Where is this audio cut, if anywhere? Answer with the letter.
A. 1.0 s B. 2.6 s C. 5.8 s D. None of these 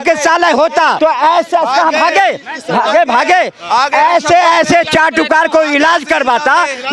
A